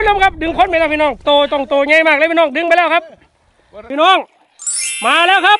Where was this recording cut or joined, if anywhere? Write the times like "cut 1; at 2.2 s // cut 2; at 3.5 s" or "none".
cut 1; at 3.7 s